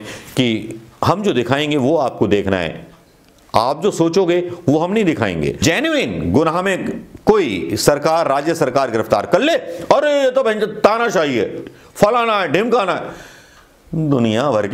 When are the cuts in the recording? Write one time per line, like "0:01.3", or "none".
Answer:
0:05.6